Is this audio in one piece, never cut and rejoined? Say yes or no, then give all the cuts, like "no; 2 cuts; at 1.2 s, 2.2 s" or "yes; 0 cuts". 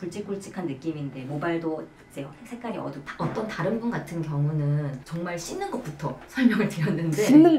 no; 1 cut; at 3.0 s